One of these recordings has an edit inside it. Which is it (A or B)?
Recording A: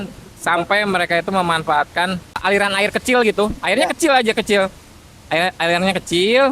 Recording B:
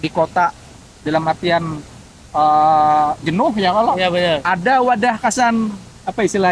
A